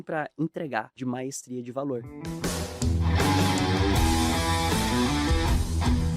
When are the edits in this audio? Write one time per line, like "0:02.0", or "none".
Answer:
0:00.9
0:02.2